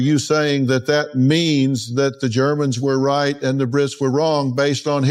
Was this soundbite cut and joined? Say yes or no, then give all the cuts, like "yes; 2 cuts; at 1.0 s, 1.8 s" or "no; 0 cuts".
no; 0 cuts